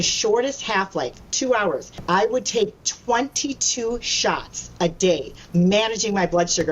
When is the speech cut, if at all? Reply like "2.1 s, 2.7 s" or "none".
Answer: 1.9 s